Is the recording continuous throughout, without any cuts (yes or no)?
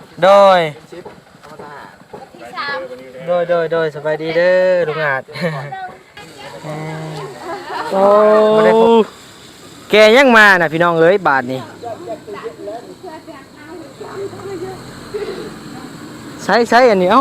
no